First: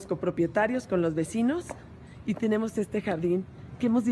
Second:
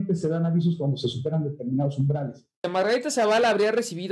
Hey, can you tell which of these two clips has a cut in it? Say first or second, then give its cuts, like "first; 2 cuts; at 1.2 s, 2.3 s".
second; 1 cut; at 2.5 s